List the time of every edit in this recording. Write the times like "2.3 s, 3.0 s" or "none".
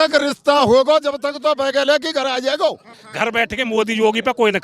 3.0 s